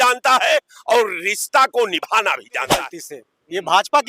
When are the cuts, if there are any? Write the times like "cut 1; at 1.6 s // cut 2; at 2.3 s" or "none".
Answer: cut 1; at 2.7 s